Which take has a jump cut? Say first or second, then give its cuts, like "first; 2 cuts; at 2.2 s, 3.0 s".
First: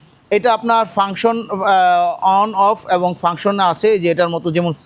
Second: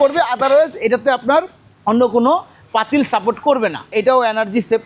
second; 1 cut; at 3.9 s